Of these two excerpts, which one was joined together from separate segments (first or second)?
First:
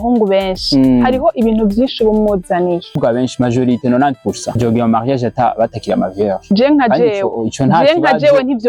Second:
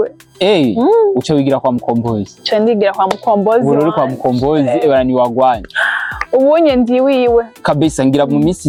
first